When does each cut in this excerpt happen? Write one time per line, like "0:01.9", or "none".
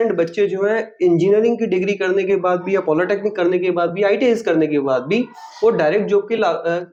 none